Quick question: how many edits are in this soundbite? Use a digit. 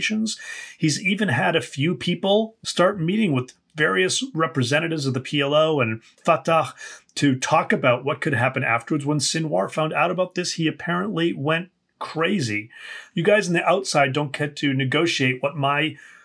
3